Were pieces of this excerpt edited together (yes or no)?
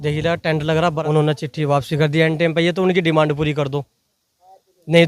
yes